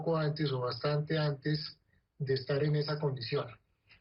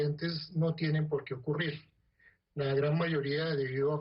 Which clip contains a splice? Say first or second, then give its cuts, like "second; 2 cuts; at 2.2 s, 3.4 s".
second; 1 cut; at 1.0 s